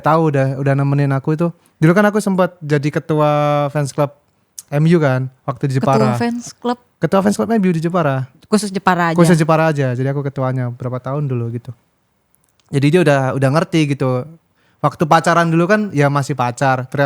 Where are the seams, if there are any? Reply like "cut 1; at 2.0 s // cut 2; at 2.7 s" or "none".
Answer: none